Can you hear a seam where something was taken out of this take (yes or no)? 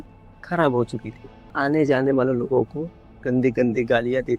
yes